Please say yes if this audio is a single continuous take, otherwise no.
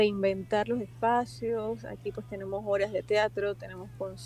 yes